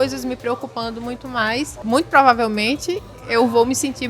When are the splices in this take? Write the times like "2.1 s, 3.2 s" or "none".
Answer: 1.8 s